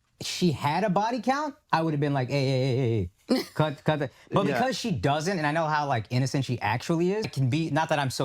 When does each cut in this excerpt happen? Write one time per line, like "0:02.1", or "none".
0:07.2